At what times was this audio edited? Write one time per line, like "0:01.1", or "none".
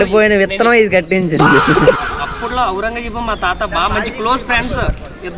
0:01.9